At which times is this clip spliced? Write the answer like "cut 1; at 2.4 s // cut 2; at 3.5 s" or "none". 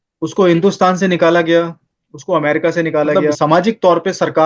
cut 1; at 3.3 s